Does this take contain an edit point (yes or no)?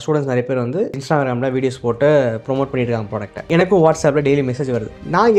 no